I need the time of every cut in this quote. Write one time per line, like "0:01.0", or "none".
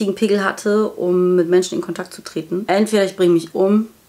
0:02.7